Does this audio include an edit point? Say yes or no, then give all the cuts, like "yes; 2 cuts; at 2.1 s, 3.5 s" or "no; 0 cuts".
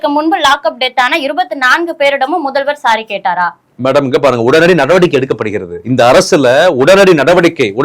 no; 0 cuts